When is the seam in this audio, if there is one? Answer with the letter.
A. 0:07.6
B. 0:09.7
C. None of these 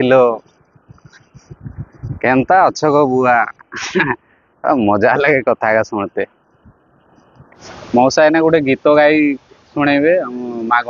A